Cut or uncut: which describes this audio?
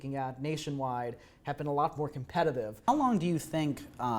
cut